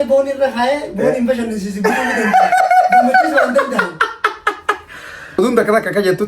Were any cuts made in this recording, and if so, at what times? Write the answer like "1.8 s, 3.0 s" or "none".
5.4 s